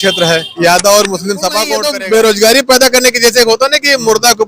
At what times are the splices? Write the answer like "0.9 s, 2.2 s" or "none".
1.8 s